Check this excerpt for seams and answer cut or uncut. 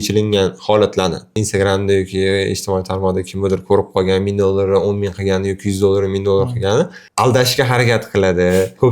cut